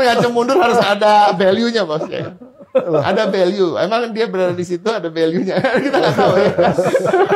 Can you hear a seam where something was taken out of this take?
no; 0 cuts

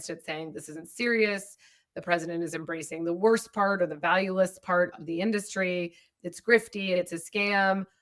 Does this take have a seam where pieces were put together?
no; 0 cuts

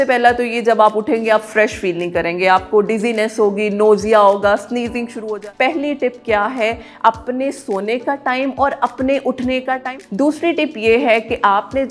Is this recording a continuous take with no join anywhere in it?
no; 2 cuts; at 5.2 s, 9.8 s

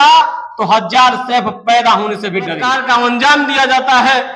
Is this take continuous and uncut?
no; 1 cut; at 2.6 s

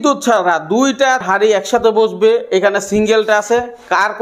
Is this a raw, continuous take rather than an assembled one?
no; 1 cut; at 1.2 s

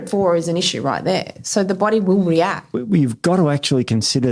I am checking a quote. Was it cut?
yes; 1 cut; at 2.8 s

